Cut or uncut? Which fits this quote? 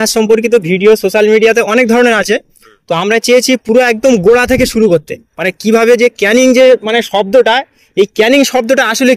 uncut